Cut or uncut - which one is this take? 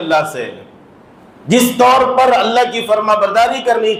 uncut